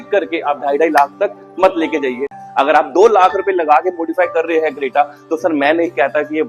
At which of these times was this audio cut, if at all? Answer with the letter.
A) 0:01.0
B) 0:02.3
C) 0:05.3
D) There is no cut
B